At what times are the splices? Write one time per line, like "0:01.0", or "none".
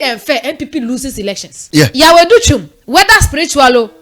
0:01.5